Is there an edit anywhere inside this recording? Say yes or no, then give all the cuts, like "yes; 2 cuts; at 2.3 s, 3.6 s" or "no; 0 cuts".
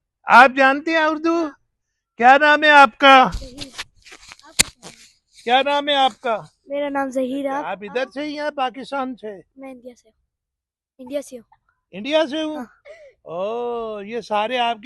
yes; 1 cut; at 7.7 s